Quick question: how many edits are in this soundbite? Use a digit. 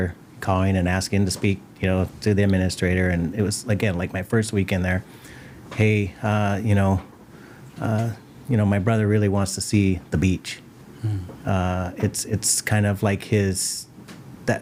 0